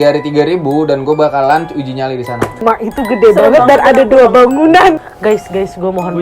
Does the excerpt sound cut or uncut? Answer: cut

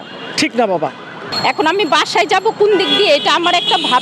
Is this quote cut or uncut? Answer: cut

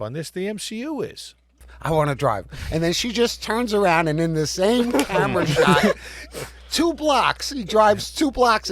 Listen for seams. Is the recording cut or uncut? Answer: cut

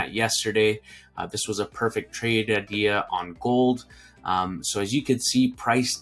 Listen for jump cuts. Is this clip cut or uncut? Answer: uncut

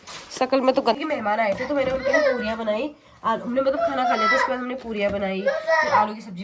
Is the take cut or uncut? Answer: cut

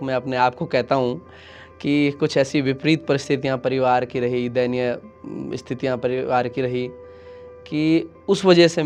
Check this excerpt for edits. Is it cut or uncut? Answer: uncut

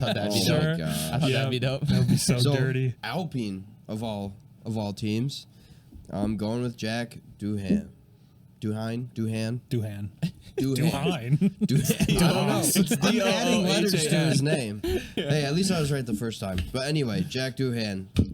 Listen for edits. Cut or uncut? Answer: cut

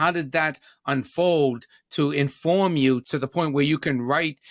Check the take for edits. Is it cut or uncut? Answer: cut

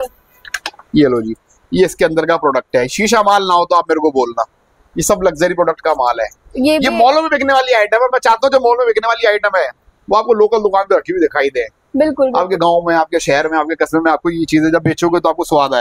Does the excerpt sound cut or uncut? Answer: uncut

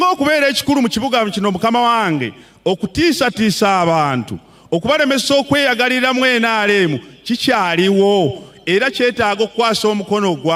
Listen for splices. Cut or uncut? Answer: uncut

